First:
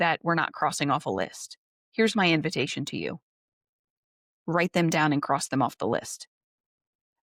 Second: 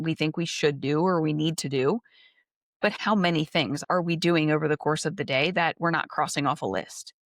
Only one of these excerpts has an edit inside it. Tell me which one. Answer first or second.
second